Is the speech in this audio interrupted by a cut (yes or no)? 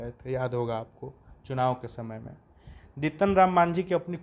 no